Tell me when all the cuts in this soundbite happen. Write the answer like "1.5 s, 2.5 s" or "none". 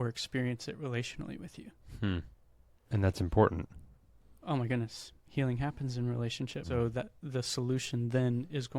6.7 s